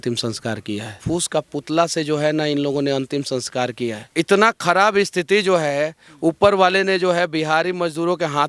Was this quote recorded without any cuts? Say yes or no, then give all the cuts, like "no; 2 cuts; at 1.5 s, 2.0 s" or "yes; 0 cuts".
no; 2 cuts; at 1.0 s, 4.0 s